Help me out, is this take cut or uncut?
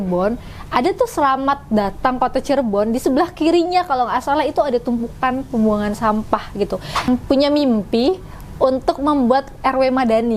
cut